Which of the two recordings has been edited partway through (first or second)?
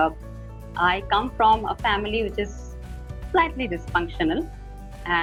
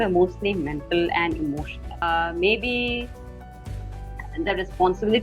second